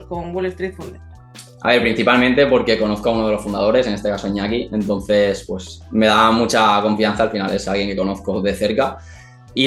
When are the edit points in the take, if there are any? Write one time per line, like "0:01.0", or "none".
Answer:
none